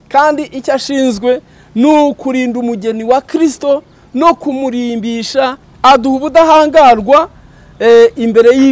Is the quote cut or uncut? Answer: cut